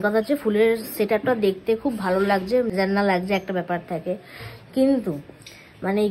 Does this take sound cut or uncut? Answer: cut